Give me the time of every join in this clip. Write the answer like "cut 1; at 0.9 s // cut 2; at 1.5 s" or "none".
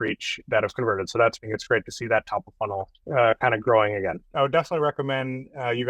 cut 1; at 1.4 s // cut 2; at 4.3 s